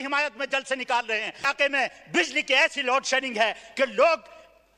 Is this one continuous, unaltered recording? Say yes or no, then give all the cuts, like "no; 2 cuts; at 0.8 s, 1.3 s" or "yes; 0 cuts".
no; 1 cut; at 1.5 s